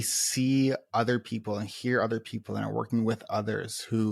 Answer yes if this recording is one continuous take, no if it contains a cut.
yes